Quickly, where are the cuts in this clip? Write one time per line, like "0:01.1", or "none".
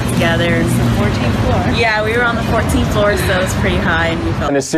0:01.6